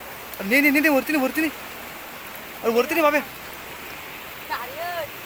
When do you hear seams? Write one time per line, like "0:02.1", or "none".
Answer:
none